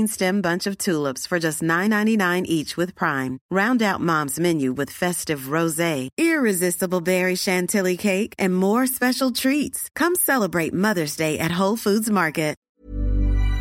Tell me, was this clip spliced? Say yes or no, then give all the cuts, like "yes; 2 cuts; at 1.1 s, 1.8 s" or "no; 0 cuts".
yes; 1 cut; at 12.6 s